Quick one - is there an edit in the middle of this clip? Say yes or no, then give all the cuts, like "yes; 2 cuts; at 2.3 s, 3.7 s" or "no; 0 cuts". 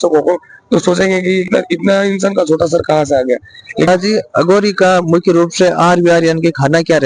yes; 2 cuts; at 1.5 s, 3.9 s